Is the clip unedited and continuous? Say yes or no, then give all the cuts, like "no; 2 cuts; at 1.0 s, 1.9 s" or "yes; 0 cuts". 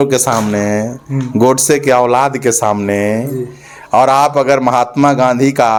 yes; 0 cuts